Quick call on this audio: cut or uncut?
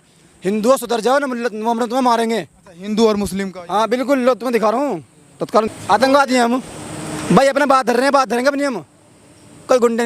cut